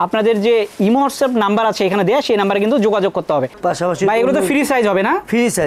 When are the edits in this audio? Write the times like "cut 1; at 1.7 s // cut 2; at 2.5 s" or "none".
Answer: cut 1; at 3.5 s